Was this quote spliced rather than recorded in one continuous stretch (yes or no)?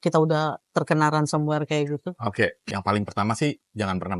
yes